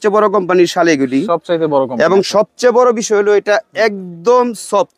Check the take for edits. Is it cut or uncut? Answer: uncut